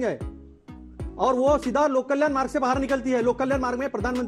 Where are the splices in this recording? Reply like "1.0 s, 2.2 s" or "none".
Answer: none

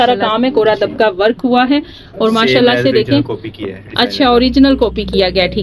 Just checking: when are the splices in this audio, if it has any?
none

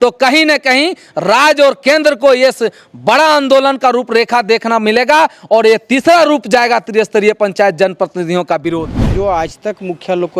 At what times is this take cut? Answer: 9.1 s

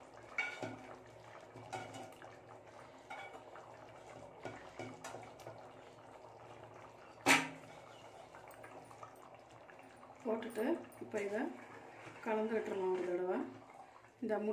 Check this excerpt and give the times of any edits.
9.2 s

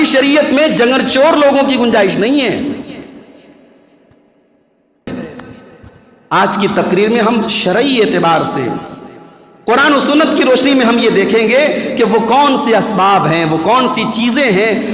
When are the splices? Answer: 5.2 s

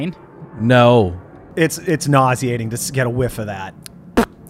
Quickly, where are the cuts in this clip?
1.5 s

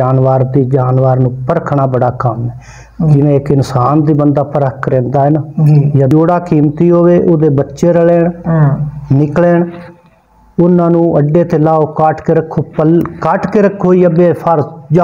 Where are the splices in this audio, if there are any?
6.1 s

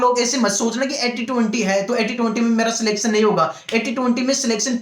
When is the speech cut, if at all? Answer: none

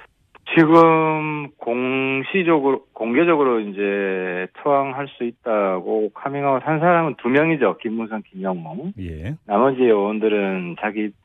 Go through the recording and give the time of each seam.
7.6 s

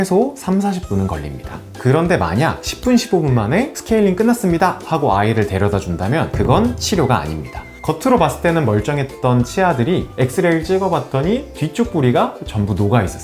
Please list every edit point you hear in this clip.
7.8 s

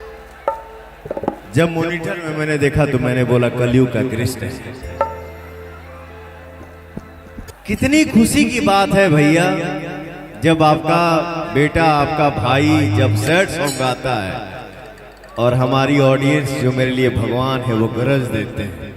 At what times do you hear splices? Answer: 7.5 s

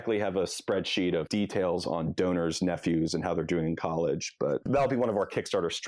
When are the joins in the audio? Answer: 1.3 s, 4.6 s

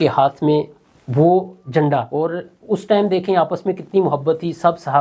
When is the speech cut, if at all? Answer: 2.1 s

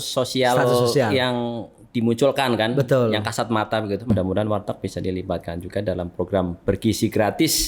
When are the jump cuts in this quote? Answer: 4.1 s

